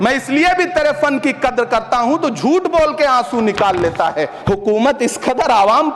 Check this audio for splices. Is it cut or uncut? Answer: cut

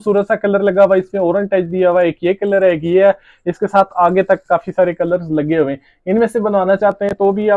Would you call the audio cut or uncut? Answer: uncut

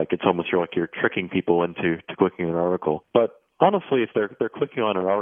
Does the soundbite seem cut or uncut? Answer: cut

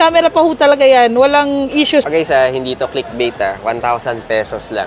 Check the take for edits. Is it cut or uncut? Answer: cut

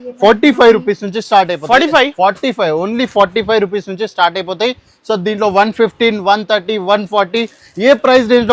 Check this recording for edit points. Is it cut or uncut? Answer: uncut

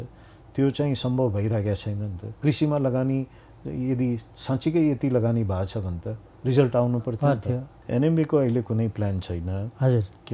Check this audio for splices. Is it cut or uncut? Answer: cut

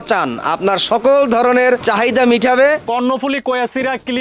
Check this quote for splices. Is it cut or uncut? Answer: cut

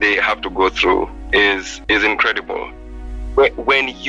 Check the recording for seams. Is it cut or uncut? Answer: cut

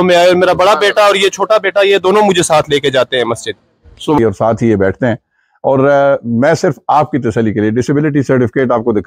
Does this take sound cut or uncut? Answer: cut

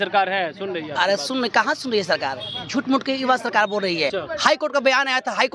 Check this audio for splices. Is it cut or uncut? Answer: cut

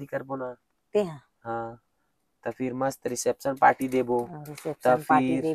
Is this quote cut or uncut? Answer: uncut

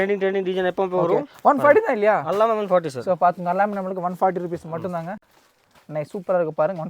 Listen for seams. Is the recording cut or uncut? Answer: uncut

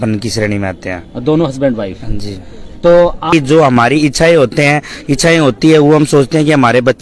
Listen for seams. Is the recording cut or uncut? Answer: cut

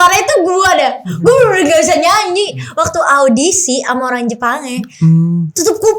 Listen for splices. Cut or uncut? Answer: uncut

